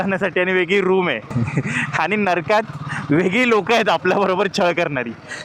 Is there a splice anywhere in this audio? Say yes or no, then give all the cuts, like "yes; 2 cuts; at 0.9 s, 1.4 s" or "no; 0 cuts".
no; 0 cuts